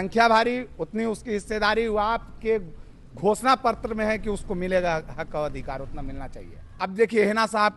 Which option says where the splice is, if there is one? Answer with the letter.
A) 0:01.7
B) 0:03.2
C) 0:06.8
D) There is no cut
C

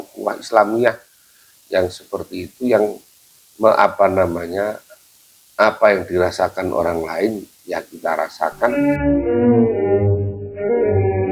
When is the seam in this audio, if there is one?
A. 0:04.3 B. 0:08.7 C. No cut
B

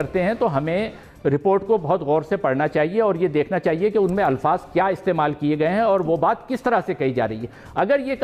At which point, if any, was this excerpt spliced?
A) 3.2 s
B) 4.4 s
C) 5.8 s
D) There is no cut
D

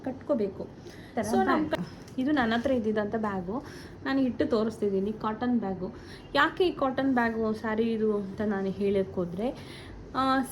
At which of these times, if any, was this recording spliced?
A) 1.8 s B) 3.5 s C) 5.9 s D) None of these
A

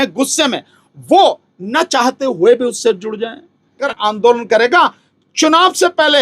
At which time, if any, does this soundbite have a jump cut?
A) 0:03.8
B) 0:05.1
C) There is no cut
A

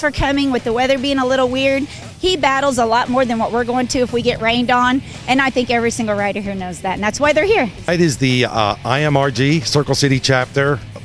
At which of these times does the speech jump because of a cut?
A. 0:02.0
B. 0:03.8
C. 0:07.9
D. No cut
C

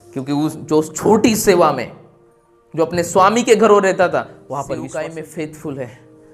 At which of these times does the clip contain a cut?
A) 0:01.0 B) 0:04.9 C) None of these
B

